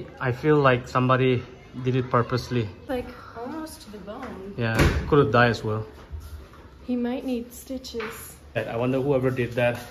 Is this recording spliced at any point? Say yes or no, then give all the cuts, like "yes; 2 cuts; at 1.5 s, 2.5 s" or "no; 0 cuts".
yes; 2 cuts; at 2.8 s, 8.6 s